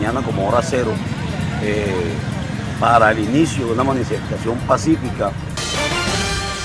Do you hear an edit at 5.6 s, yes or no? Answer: yes